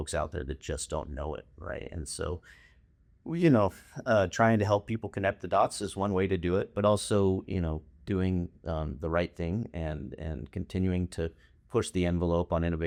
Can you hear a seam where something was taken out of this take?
no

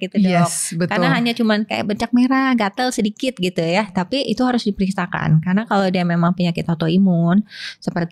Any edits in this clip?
no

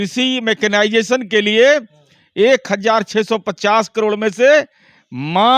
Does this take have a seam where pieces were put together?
no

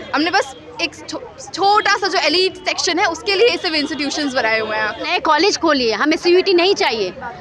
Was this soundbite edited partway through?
yes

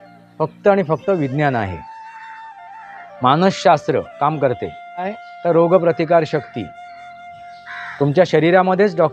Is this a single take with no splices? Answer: no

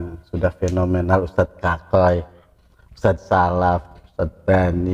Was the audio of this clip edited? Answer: no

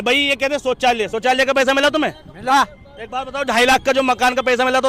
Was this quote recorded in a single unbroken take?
yes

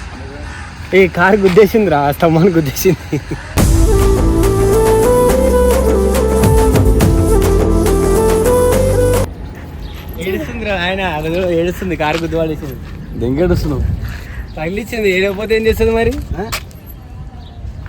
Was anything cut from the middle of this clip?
yes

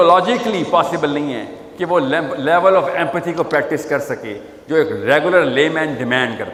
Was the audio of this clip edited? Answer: no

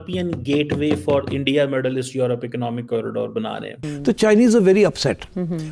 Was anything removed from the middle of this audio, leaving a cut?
no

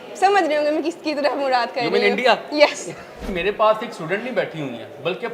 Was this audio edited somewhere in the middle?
yes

